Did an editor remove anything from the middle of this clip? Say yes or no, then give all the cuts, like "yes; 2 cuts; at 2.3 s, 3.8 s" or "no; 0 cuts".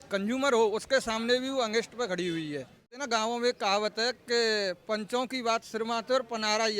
yes; 1 cut; at 3.0 s